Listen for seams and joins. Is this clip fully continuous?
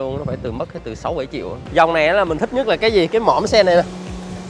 no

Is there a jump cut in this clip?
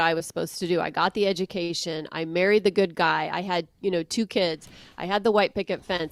no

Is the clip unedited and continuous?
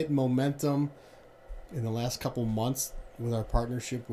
no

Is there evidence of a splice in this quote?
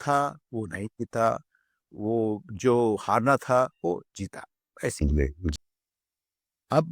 yes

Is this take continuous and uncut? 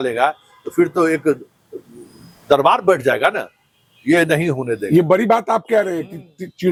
yes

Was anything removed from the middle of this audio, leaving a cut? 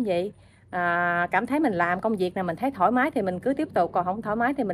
no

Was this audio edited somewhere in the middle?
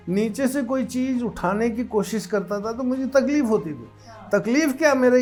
no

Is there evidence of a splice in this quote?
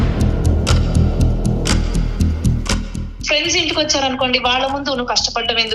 yes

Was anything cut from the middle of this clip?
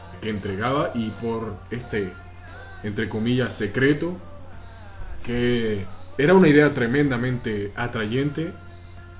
no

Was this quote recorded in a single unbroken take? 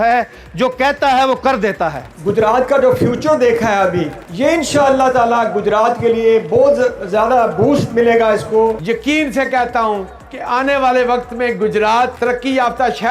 no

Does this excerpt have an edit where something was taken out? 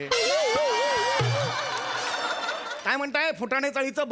yes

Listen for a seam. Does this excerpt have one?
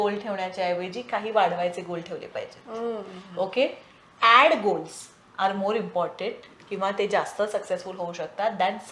no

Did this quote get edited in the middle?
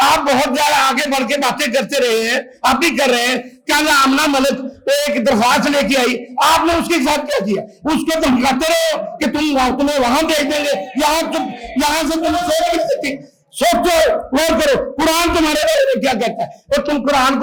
no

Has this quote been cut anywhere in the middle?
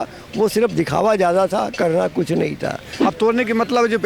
yes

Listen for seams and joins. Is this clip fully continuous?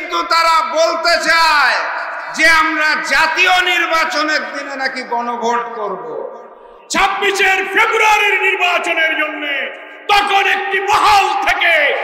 no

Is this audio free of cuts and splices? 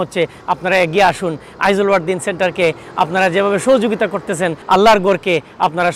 no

